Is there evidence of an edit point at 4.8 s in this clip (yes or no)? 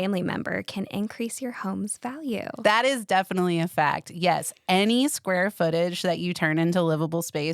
no